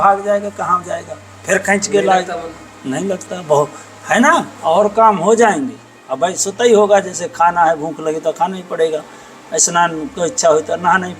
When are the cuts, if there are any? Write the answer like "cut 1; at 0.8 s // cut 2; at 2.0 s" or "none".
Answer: cut 1; at 4.5 s